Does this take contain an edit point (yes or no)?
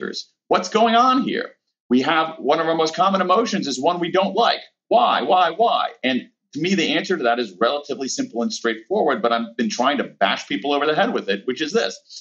no